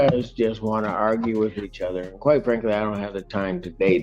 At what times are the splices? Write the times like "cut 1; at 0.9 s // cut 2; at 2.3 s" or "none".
none